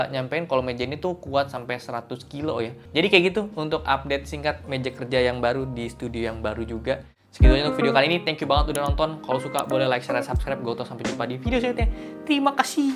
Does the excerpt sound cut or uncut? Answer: uncut